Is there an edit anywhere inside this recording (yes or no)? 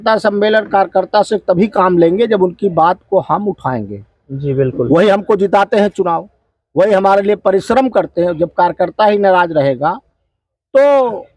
no